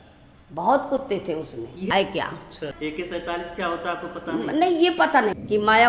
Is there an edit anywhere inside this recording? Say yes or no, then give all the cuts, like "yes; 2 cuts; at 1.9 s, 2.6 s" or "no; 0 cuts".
yes; 3 cuts; at 1.9 s, 2.7 s, 4.9 s